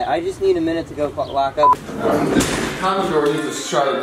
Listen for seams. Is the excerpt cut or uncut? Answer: cut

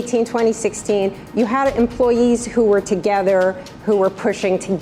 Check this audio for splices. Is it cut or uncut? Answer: uncut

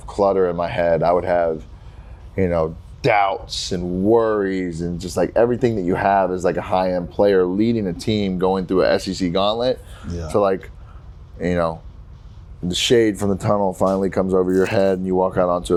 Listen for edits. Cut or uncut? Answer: uncut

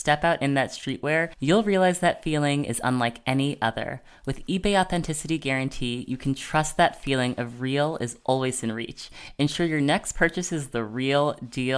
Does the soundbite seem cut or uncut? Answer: uncut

